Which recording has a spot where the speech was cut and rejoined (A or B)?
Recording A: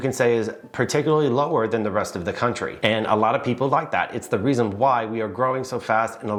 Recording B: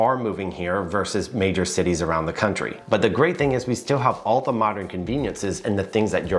B